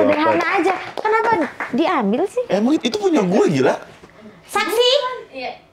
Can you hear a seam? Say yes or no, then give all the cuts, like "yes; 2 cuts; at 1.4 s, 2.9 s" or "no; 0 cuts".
no; 0 cuts